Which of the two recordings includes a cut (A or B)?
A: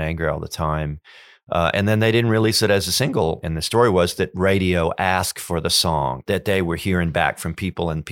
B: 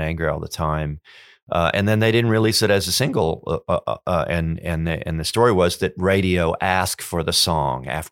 A